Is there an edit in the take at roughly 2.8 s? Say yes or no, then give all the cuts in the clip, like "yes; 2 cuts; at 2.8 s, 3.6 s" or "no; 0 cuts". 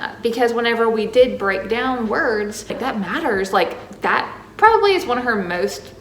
yes; 1 cut; at 2.8 s